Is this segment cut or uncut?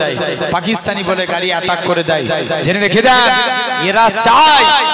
uncut